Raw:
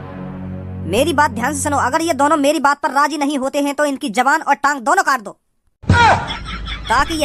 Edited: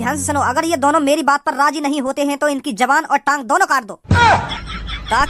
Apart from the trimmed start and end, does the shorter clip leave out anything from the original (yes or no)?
yes